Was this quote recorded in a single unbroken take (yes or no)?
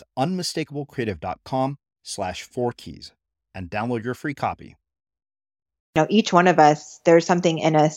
no